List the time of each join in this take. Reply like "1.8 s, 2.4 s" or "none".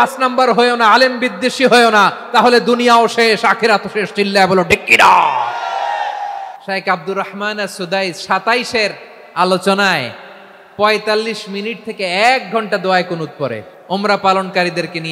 6.5 s, 13.7 s